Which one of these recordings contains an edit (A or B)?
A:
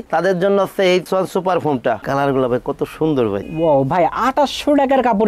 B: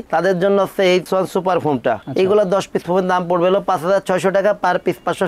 A